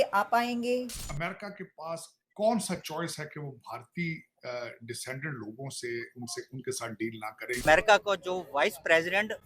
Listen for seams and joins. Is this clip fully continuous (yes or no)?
no